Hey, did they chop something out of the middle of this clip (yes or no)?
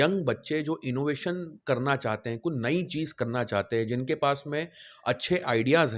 no